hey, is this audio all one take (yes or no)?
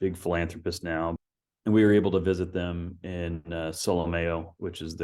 no